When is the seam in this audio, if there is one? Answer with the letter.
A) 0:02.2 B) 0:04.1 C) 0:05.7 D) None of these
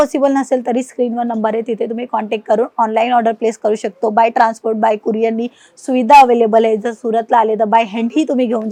D